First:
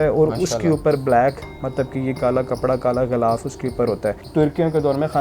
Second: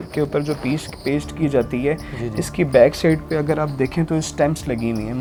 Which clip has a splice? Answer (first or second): first